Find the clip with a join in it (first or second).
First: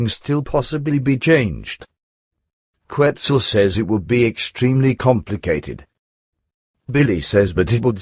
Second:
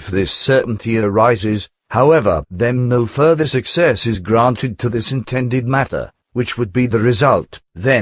second